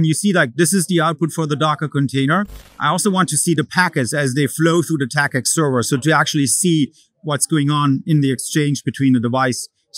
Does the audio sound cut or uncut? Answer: cut